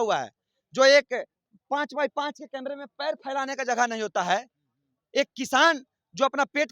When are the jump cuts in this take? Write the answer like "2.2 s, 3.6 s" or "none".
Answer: none